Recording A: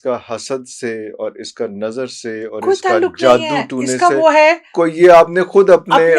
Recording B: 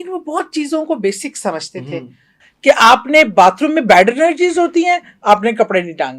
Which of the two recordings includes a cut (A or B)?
B